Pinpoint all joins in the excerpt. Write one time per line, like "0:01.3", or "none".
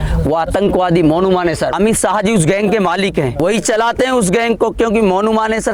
0:01.7
0:03.4